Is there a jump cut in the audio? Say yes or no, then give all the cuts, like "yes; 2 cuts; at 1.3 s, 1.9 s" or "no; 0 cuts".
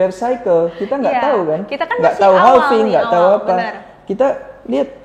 no; 0 cuts